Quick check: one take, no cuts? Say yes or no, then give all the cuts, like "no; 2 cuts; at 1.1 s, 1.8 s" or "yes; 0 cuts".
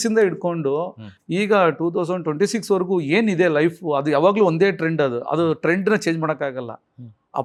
yes; 0 cuts